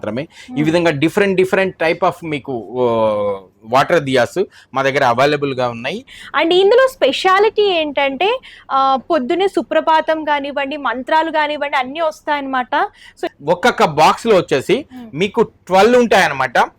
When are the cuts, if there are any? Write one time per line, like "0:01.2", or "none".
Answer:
0:06.2
0:13.2